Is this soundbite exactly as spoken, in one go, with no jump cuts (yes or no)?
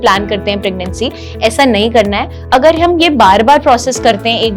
no